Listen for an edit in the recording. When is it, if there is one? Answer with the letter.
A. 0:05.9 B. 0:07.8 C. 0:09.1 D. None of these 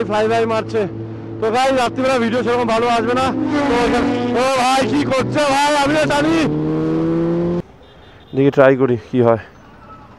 B